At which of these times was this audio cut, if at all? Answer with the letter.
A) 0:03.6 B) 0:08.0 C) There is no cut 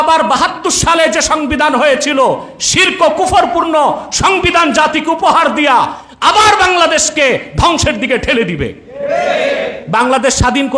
C